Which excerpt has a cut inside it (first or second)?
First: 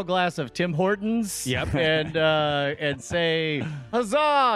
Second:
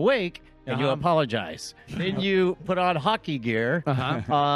second